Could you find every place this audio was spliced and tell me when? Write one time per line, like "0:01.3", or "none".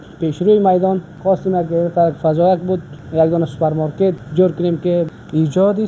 0:01.1
0:03.0
0:04.2
0:05.1